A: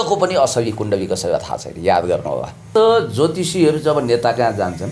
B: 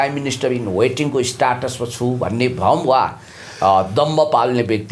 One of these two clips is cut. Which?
A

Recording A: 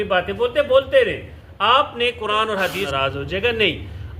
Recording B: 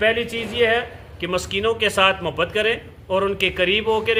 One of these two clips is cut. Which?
A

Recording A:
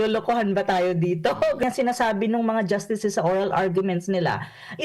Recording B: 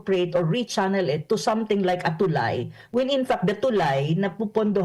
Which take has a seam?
A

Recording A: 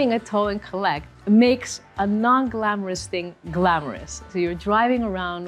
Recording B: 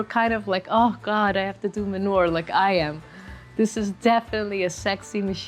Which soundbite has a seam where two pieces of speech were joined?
A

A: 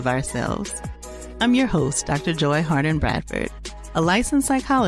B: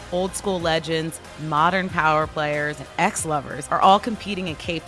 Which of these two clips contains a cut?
B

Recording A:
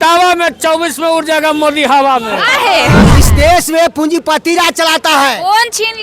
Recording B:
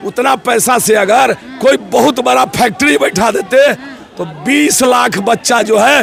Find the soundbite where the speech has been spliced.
A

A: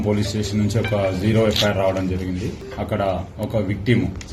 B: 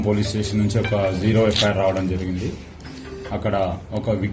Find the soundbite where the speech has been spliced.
A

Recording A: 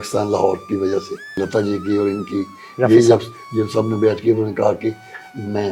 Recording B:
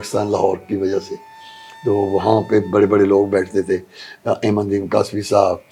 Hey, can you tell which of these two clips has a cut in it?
A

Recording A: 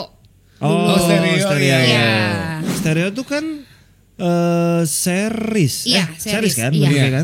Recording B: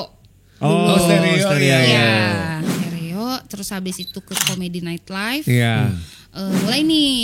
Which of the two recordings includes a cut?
B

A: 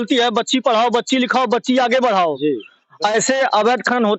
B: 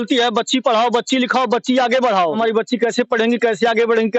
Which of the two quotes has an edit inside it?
B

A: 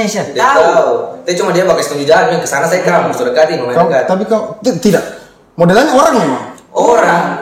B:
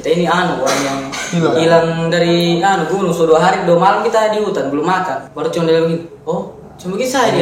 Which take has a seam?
B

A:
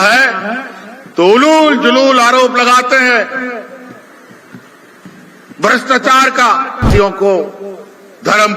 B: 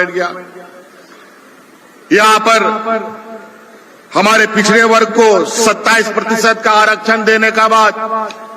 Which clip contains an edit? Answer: A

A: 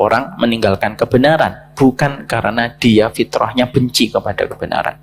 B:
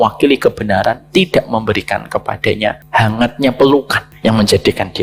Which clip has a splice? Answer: B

